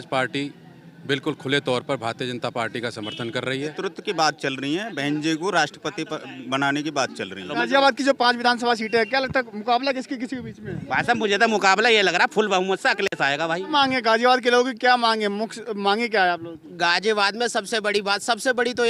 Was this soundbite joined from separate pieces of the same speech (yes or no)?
yes